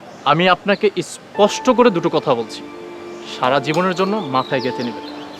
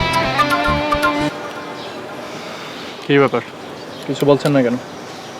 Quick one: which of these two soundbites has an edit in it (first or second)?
second